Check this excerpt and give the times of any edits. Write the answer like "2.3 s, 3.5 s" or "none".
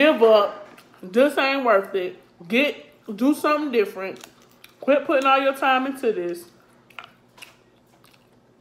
none